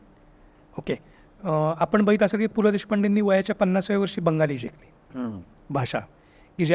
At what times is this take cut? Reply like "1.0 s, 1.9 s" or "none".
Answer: none